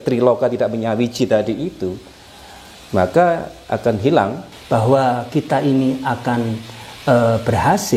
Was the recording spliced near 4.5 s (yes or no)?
yes